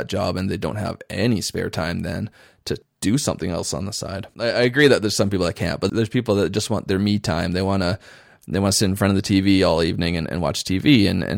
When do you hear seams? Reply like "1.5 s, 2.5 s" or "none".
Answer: 4.3 s